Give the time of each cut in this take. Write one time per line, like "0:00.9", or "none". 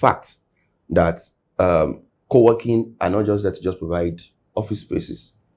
none